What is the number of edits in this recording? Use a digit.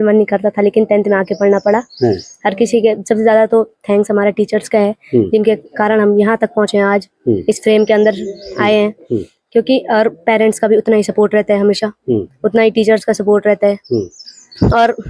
0